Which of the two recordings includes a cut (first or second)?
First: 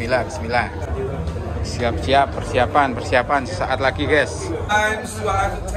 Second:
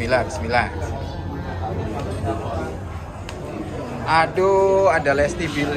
first